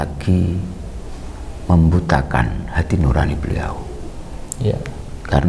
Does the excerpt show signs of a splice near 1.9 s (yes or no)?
no